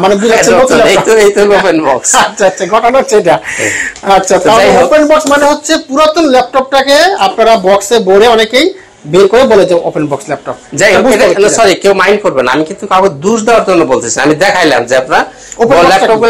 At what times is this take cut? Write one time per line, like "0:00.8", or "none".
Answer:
none